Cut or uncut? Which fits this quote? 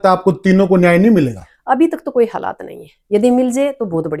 uncut